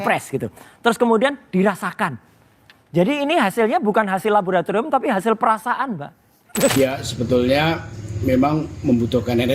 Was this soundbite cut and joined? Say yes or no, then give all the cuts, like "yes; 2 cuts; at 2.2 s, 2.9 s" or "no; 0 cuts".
yes; 1 cut; at 6.7 s